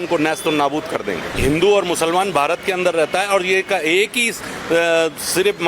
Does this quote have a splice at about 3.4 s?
no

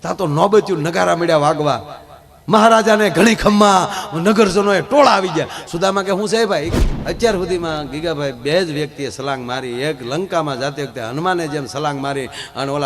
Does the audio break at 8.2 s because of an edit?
no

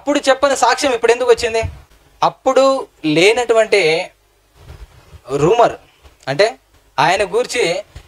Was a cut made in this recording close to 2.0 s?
yes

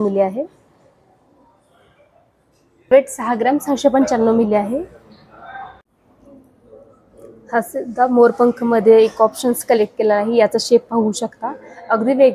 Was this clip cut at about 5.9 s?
yes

